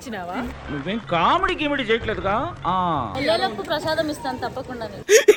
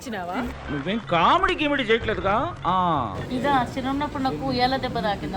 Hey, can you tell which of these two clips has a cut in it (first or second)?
second